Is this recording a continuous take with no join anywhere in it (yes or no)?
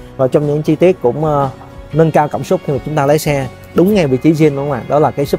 yes